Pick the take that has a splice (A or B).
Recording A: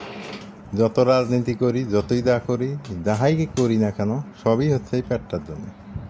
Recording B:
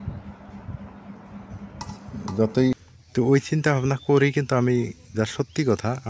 B